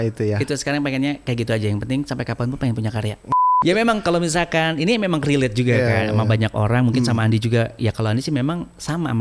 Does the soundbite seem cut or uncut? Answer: cut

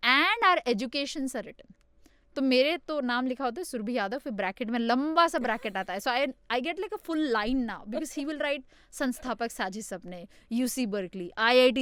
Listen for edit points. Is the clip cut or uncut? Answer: uncut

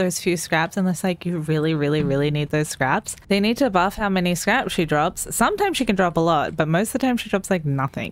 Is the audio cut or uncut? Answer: uncut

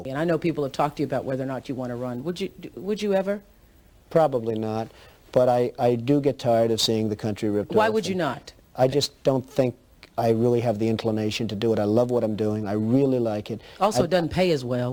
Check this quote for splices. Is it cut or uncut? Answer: uncut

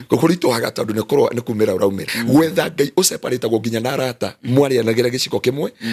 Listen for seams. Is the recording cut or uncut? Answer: cut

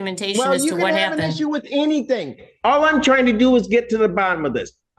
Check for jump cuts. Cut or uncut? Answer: uncut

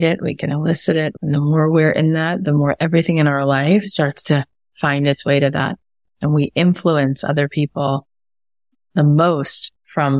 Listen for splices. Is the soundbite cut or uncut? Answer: cut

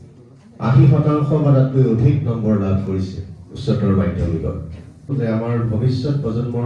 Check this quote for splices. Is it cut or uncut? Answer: cut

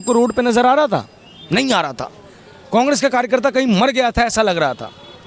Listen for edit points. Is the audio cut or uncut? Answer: uncut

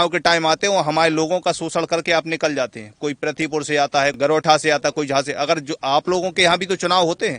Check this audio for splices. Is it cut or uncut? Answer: cut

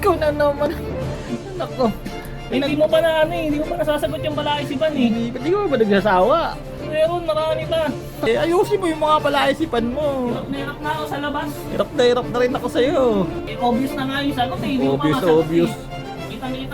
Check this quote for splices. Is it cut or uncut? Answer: cut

